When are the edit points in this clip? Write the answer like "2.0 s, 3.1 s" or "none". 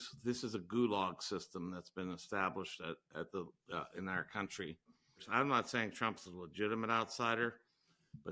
5.2 s

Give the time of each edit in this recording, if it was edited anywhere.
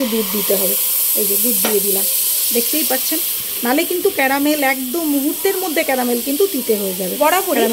none

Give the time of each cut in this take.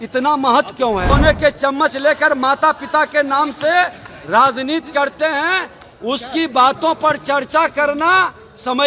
1.1 s

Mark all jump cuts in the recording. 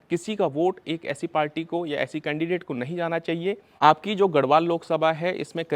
3.4 s

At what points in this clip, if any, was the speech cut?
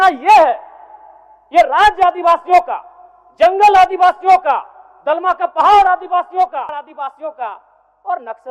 6.7 s

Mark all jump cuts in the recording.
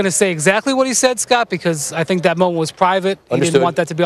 2.0 s

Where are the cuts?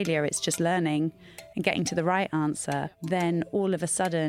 2.8 s

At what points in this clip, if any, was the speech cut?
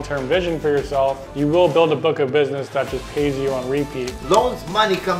1.2 s, 4.1 s

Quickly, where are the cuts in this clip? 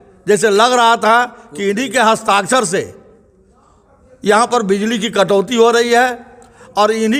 none

